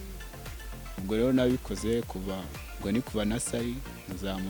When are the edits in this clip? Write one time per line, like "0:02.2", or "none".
none